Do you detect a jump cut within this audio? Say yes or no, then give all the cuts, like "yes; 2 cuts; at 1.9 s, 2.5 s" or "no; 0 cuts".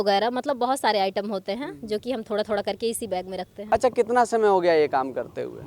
yes; 1 cut; at 3.5 s